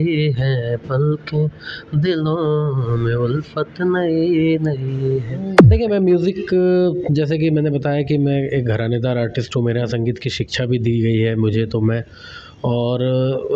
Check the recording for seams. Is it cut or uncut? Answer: cut